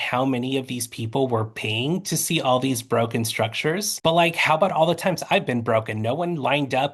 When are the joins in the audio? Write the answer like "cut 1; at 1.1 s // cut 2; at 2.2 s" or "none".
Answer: cut 1; at 3.9 s